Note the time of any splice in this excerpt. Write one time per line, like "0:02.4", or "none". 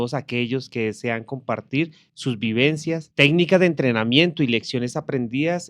0:03.1